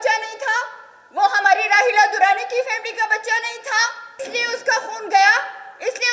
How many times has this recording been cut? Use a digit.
1